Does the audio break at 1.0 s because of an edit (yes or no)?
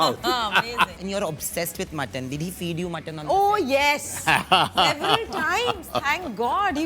yes